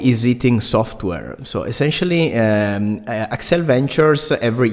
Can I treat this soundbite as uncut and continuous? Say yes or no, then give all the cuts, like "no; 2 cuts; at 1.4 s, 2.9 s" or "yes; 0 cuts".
yes; 0 cuts